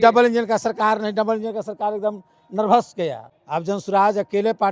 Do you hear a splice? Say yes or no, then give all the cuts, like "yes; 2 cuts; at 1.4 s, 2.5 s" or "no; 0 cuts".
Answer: yes; 1 cut; at 3.3 s